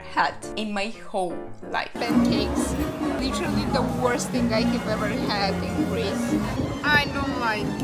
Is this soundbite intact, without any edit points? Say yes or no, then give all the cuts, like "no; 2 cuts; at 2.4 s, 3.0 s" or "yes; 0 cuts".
no; 3 cuts; at 1.9 s, 3.2 s, 6.6 s